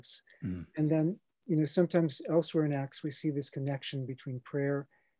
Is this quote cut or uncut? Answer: cut